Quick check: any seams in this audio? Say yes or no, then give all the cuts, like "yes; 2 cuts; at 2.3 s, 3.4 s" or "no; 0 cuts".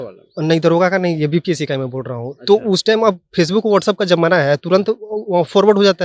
no; 0 cuts